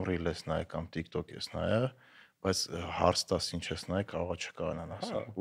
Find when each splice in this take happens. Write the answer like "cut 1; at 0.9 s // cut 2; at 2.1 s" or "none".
none